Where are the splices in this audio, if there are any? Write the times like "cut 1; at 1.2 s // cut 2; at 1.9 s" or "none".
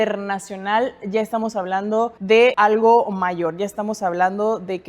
cut 1; at 2.4 s